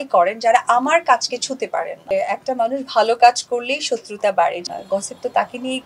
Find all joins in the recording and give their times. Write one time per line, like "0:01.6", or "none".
0:02.1
0:04.6